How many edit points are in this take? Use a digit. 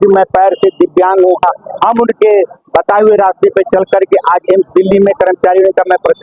1